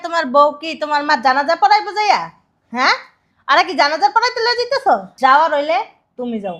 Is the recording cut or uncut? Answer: cut